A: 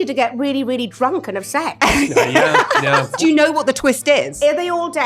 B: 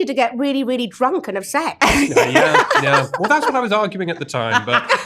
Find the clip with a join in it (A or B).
A